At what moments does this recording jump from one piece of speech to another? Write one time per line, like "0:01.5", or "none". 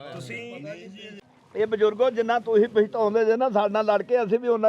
0:01.2